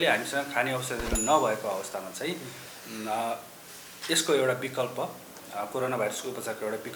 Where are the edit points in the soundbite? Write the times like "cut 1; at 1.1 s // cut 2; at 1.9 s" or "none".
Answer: none